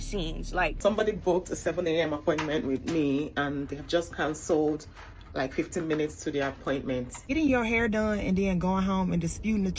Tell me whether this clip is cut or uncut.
cut